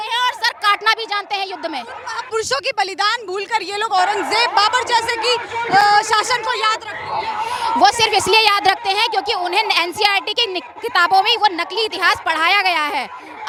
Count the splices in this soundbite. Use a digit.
0